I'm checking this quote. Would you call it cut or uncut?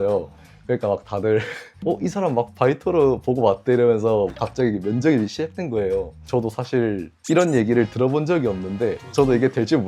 cut